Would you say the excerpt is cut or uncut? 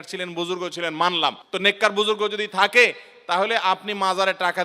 cut